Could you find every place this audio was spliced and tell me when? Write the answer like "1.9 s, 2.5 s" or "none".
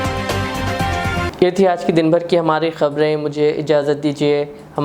none